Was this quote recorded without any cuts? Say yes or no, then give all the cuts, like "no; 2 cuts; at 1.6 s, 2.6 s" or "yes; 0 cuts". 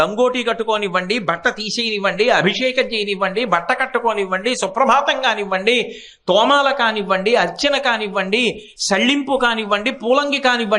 yes; 0 cuts